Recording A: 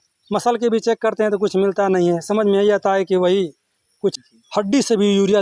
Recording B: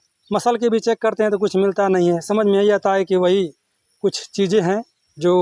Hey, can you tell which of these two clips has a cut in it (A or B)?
A